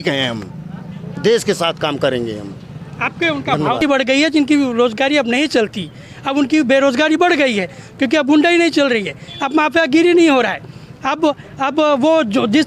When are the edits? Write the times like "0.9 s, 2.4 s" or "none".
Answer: 3.8 s

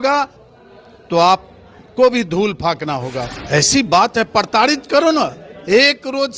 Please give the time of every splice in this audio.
3.3 s

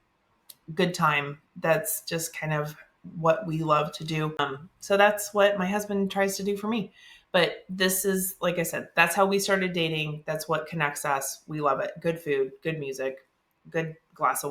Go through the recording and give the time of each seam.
4.4 s

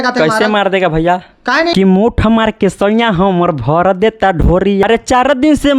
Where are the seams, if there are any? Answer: 1.7 s, 4.8 s

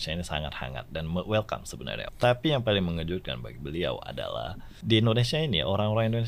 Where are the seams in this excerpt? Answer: 2.0 s, 4.7 s

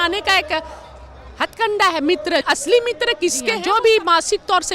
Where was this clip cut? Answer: 2.4 s, 3.6 s

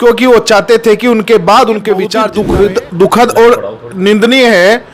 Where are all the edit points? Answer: 2.3 s

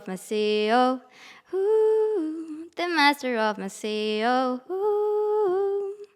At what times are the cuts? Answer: none

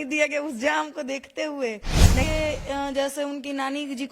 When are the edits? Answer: 2.2 s

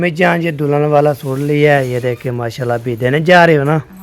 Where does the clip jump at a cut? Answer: none

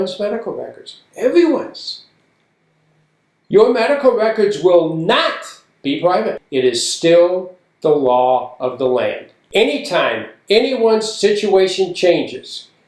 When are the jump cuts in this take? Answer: 6.4 s, 9.3 s

